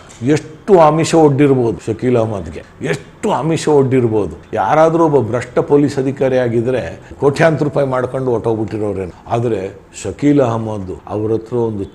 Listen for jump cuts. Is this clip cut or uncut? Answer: uncut